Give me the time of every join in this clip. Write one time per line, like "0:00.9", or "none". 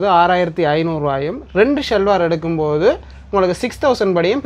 none

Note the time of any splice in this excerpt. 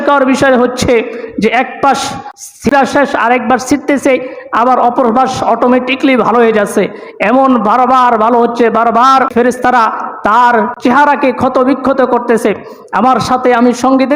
0:02.7
0:09.3
0:10.7

